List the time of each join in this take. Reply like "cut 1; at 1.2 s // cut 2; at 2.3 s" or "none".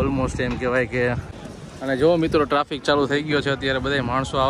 cut 1; at 1.3 s